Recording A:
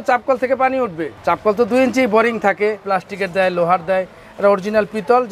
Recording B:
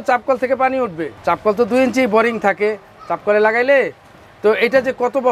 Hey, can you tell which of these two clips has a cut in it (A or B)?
A